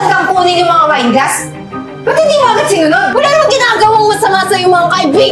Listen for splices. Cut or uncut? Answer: cut